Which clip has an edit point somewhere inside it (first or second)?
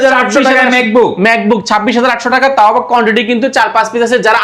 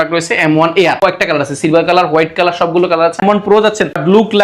second